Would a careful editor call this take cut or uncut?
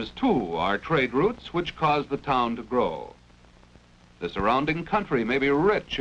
cut